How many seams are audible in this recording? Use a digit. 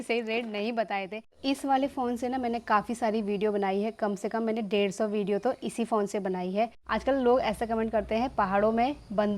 2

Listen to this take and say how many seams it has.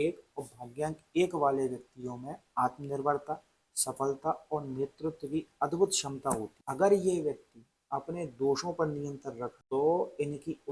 0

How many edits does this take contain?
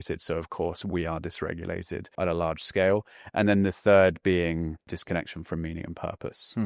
1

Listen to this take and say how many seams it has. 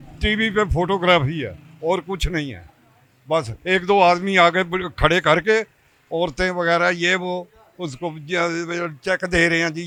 0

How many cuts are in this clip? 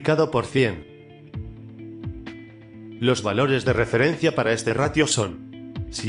0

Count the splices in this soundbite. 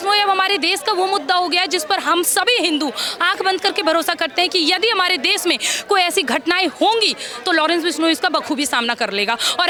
0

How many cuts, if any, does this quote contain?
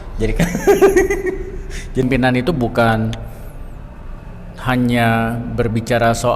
1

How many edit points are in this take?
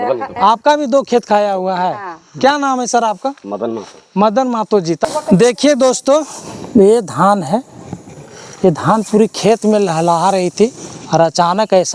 1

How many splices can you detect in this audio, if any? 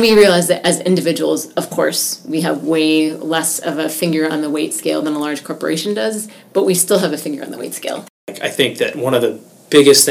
1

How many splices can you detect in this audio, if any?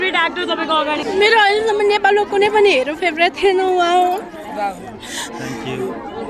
1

